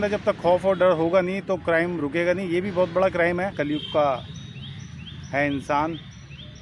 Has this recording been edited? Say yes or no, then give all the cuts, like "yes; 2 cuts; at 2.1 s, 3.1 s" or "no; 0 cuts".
yes; 1 cut; at 3.5 s